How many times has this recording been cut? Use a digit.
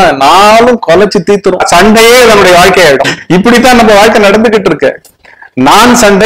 2